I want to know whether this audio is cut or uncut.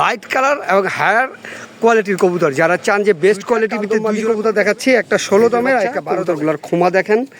cut